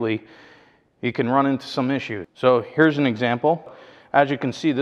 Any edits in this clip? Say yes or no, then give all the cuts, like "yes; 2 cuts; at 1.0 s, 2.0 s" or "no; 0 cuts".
yes; 2 cuts; at 2.2 s, 3.7 s